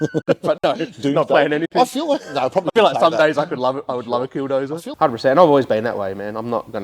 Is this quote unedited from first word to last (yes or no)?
no